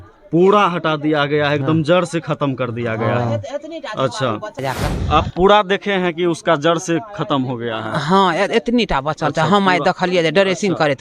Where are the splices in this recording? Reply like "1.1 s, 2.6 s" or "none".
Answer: 4.6 s